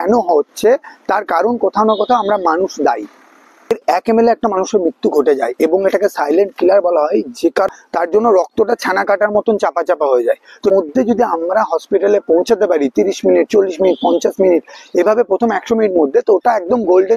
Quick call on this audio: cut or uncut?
cut